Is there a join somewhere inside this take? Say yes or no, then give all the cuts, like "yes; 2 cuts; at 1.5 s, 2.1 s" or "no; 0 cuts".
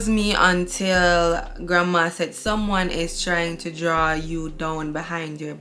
no; 0 cuts